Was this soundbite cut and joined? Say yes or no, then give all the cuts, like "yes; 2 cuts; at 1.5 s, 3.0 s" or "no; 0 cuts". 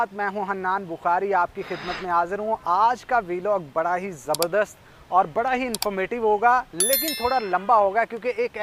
no; 0 cuts